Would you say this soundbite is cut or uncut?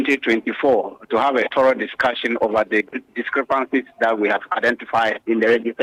uncut